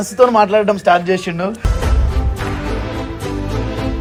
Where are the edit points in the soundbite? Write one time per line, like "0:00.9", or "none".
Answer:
none